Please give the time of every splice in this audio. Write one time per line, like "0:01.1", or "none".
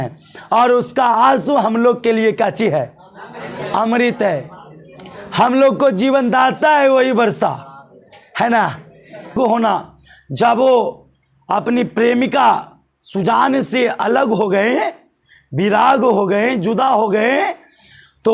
0:09.3